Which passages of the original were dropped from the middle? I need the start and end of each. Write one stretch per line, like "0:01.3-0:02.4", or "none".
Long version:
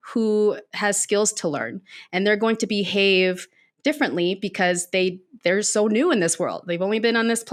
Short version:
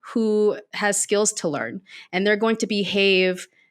none